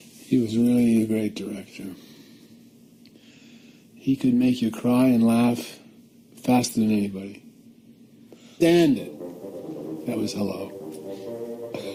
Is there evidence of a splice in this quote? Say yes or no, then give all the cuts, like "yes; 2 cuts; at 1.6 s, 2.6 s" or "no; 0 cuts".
no; 0 cuts